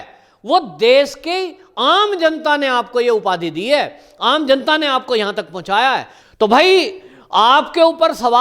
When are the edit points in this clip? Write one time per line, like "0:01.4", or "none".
0:06.2